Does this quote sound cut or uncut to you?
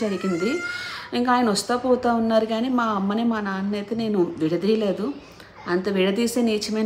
uncut